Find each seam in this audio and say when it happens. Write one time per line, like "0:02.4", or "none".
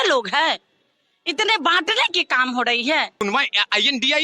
0:03.2